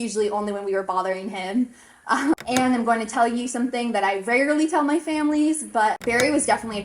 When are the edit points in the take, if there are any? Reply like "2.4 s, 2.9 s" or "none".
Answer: 2.4 s, 6.0 s